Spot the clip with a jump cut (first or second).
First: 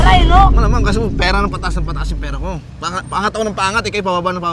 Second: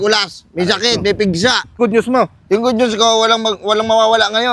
second